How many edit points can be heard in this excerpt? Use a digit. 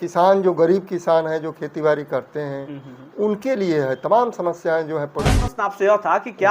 1